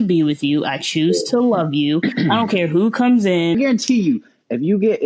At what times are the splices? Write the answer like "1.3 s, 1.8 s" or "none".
3.5 s

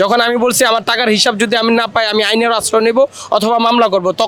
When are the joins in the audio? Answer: none

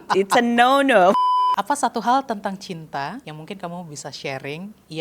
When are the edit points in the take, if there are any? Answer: 1.1 s, 3.3 s

